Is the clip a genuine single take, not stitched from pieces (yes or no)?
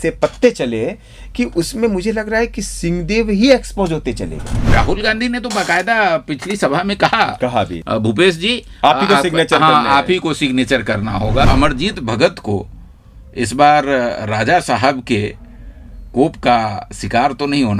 no